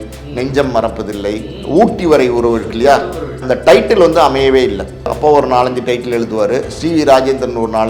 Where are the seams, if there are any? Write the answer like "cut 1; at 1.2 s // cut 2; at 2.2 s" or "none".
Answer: cut 1; at 3.4 s // cut 2; at 5.1 s